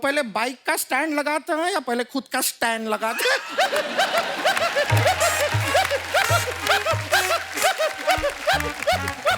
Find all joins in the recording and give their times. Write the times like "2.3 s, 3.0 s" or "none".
none